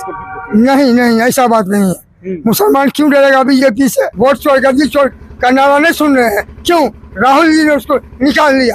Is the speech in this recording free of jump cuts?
no; 1 cut; at 4.1 s

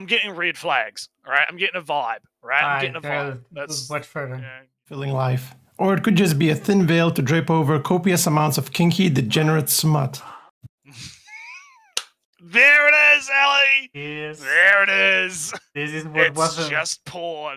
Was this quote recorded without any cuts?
no; 1 cut; at 5.0 s

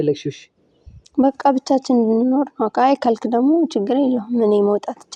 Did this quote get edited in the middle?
no; 0 cuts

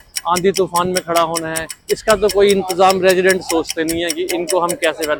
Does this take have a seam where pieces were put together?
no; 0 cuts

